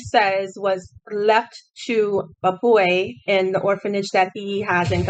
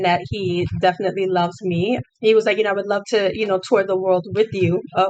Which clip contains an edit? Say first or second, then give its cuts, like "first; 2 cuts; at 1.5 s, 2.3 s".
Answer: second; 1 cut; at 2.1 s